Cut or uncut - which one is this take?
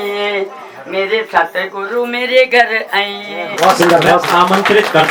cut